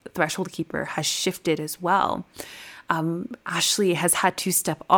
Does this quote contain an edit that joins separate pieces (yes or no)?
no